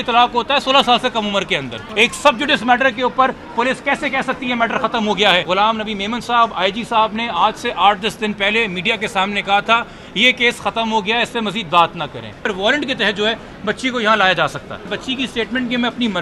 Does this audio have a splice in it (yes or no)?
yes